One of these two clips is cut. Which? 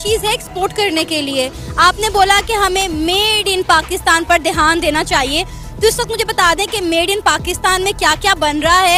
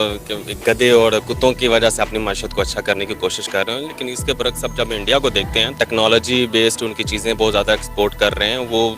second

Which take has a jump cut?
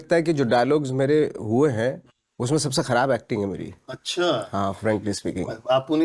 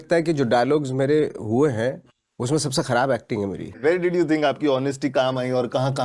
second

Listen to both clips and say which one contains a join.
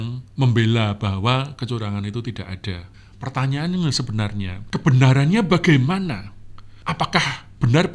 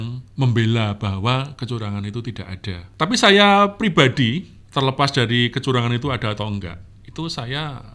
first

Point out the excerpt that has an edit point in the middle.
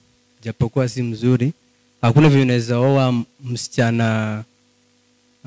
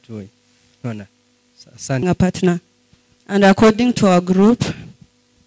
second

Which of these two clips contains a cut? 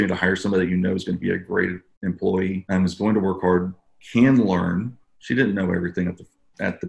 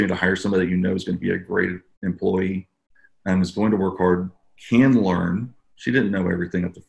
first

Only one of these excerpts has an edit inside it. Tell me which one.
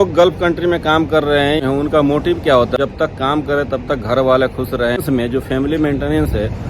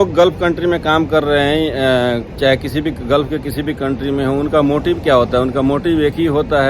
first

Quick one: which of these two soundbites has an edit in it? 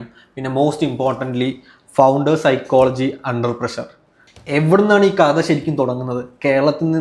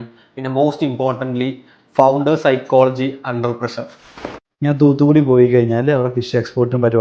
second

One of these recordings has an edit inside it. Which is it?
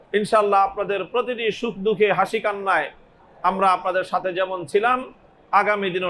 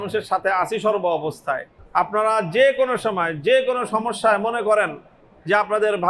second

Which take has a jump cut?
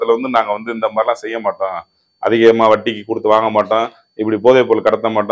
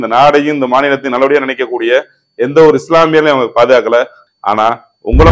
second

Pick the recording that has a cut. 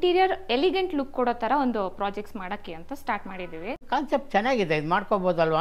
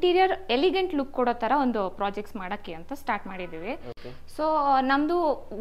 first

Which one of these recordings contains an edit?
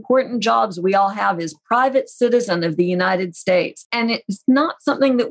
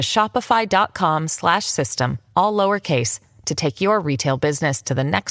first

